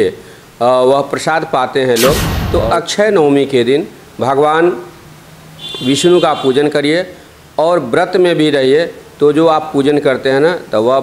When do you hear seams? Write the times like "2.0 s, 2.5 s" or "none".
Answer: 2.3 s